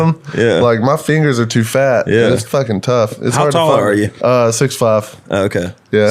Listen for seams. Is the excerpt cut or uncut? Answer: cut